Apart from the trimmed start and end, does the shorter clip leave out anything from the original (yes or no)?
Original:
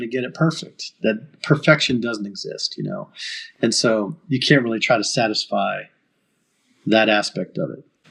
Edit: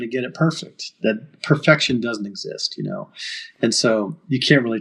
no